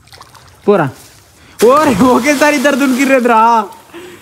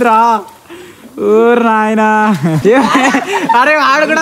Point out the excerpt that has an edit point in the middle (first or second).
second